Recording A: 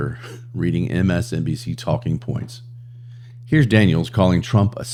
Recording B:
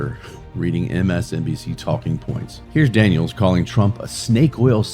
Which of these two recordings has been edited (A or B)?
B